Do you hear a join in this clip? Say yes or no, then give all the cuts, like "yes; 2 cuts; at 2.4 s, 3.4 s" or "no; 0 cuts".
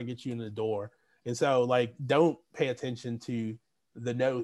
no; 0 cuts